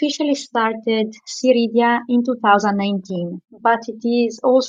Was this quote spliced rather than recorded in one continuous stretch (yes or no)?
no